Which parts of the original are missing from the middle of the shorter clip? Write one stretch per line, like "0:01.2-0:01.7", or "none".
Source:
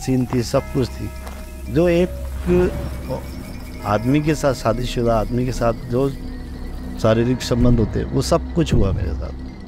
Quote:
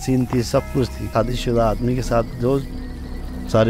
0:01.1-0:04.6